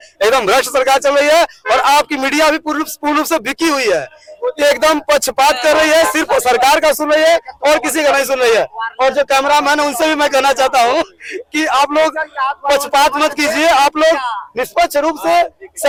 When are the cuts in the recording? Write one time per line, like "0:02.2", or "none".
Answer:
none